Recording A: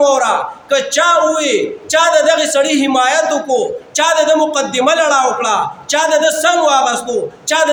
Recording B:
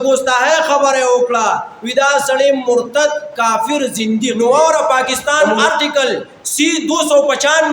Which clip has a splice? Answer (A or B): B